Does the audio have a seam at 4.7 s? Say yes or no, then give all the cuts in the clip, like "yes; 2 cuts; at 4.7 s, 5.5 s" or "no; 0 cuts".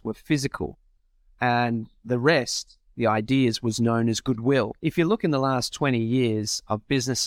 yes; 1 cut; at 4.7 s